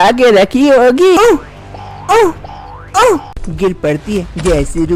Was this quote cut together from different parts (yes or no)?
yes